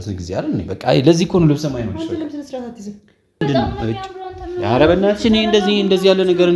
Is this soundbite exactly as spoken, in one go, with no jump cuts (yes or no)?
no